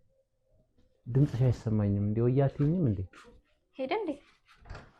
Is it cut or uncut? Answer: uncut